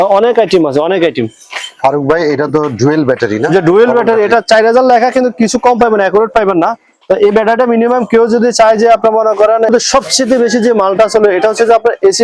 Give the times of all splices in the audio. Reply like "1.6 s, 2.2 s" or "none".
9.7 s